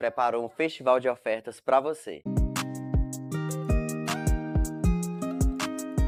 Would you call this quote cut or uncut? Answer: uncut